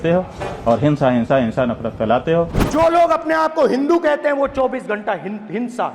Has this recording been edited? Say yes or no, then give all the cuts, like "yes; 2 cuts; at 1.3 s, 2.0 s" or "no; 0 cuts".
yes; 1 cut; at 2.6 s